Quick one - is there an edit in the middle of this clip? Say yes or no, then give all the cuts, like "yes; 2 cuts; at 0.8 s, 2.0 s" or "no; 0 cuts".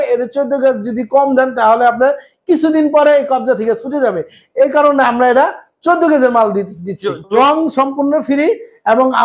yes; 1 cut; at 7.3 s